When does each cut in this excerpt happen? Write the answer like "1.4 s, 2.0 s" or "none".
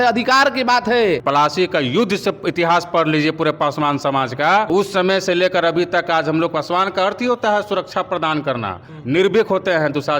1.2 s, 4.7 s

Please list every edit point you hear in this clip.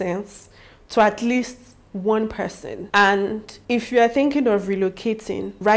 none

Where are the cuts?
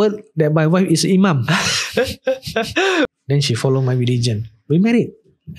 3.1 s

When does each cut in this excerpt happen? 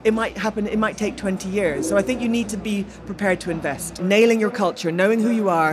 4.0 s

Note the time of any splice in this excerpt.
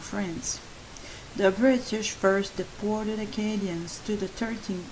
2.6 s

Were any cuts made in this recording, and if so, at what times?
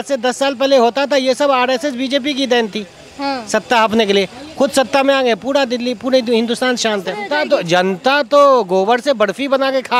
7.3 s

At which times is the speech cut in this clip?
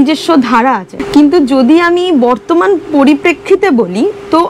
0.9 s

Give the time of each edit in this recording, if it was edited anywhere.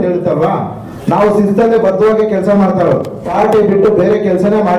3.2 s

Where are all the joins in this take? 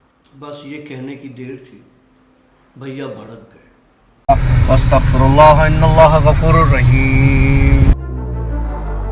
4.1 s

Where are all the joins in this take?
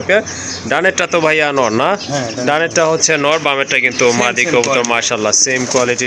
none

